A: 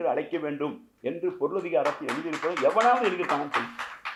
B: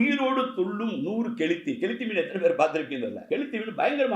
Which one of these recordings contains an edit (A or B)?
B